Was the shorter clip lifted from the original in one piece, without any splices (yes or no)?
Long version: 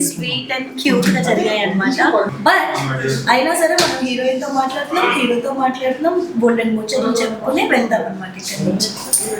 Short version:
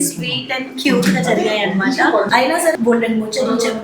no